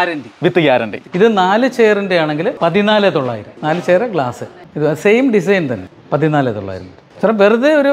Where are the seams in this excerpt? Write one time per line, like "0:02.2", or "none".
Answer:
0:01.0
0:02.5
0:03.5
0:05.9

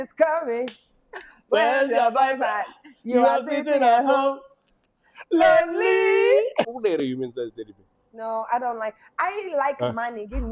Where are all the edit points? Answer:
0:06.7

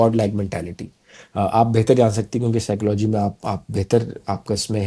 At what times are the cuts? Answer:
none

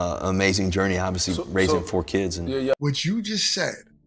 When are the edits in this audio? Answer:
0:02.8

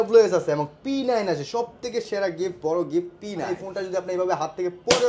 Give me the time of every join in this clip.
0:03.5

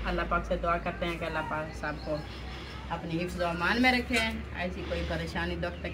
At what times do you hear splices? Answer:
none

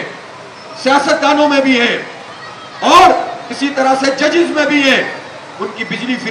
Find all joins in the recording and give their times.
none

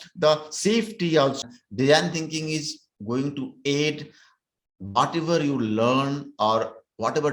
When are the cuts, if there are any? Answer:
0:01.4

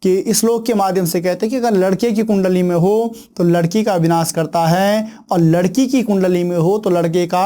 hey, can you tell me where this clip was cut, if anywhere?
none

